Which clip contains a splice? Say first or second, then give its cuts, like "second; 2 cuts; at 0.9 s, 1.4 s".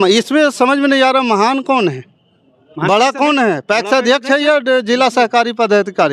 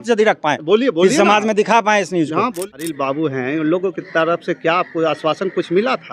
second; 1 cut; at 2.6 s